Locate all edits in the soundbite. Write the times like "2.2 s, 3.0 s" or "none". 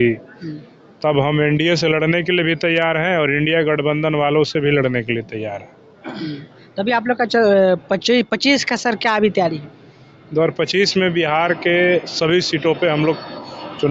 none